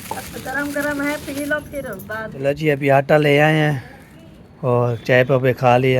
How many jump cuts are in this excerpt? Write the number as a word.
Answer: one